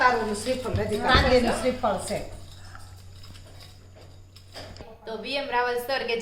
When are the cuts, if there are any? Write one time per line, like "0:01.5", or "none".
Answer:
0:01.1
0:04.9